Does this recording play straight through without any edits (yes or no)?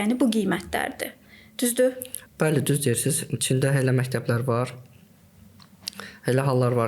yes